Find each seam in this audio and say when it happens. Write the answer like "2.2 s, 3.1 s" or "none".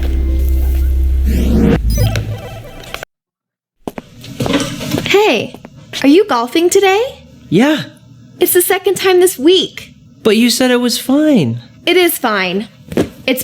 3.1 s